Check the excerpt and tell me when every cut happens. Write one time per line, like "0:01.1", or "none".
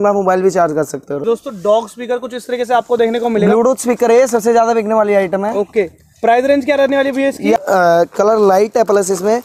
0:01.2
0:07.6